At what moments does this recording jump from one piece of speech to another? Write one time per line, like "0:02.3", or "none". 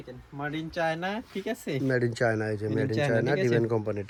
none